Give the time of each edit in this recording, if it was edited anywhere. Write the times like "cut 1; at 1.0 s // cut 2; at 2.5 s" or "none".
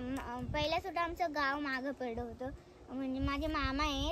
none